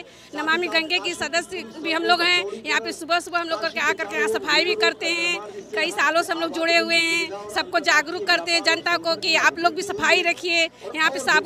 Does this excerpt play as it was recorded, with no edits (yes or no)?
yes